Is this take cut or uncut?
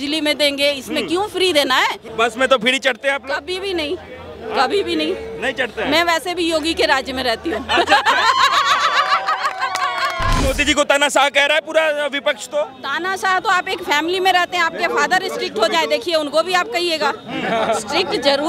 cut